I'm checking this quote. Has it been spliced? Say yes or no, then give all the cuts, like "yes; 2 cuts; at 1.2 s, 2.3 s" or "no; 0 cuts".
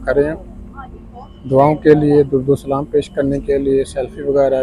no; 0 cuts